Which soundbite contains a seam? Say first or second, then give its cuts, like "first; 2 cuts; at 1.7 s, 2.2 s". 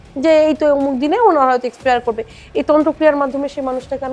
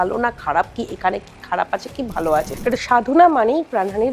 second; 1 cut; at 2.5 s